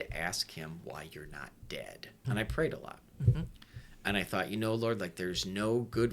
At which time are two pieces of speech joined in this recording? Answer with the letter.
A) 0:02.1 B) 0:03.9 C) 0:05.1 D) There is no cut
A